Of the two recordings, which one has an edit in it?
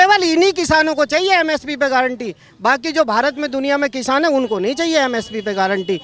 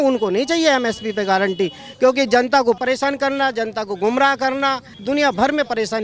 second; 2 cuts; at 2.8 s, 4.9 s

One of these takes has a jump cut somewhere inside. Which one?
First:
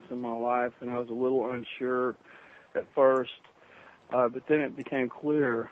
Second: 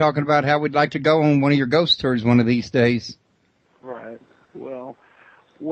first; 1 cut; at 3.9 s

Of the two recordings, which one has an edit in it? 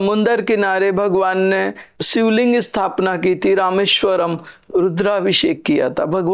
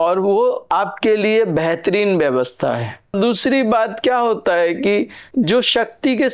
second; 1 cut; at 3.1 s

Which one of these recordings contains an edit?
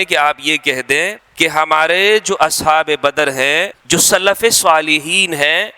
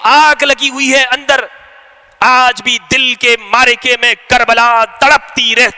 first; 2 cuts; at 1.2 s, 3.8 s

